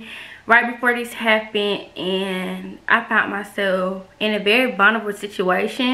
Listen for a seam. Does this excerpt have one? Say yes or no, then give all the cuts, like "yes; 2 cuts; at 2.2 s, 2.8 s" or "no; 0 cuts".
no; 0 cuts